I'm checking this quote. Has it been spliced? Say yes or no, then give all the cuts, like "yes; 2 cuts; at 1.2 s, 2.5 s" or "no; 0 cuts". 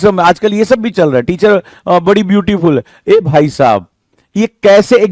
no; 0 cuts